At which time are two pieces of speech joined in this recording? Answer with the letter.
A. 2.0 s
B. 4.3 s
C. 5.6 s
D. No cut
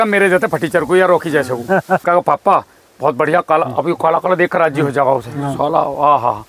A